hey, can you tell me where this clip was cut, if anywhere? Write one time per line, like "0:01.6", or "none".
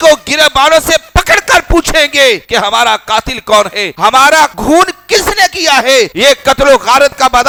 none